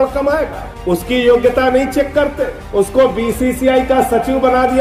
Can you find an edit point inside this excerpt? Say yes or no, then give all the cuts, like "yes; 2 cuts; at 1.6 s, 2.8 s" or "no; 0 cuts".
no; 0 cuts